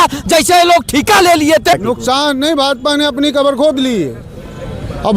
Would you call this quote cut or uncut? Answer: cut